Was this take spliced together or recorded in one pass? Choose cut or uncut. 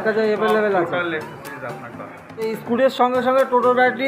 cut